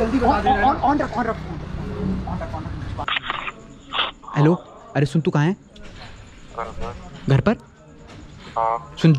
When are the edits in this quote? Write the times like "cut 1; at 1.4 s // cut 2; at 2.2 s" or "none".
cut 1; at 3.1 s